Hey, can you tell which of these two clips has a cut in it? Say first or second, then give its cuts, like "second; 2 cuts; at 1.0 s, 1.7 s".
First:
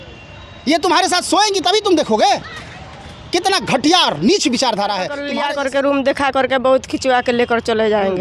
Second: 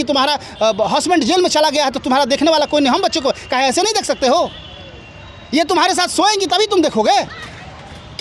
first; 1 cut; at 5.2 s